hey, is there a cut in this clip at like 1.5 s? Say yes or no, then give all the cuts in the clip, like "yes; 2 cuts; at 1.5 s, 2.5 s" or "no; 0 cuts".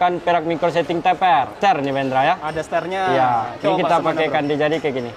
yes; 1 cut; at 1.5 s